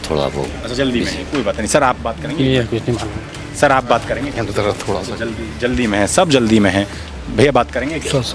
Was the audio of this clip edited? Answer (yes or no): no